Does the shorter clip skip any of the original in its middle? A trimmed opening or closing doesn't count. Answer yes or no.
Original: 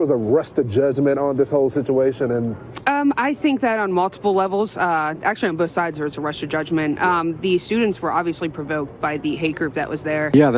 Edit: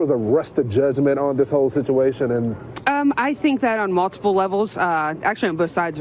no